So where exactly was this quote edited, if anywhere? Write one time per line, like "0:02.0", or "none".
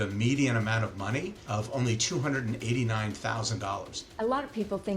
0:01.4
0:04.0